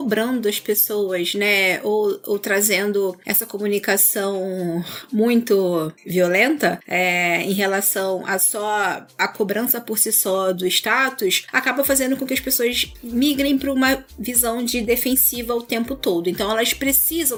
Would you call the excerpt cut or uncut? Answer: uncut